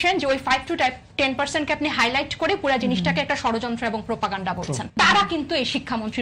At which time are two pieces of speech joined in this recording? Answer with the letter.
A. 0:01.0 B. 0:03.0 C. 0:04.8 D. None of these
C